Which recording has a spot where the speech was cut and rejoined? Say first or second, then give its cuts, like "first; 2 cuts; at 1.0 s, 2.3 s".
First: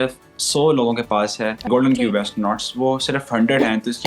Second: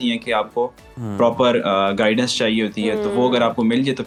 first; 1 cut; at 1.7 s